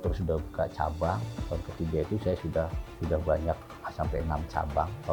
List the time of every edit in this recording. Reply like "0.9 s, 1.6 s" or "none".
1.4 s